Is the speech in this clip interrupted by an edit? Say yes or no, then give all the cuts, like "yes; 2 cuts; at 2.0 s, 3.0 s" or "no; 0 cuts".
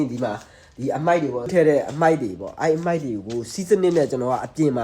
yes; 1 cut; at 1.5 s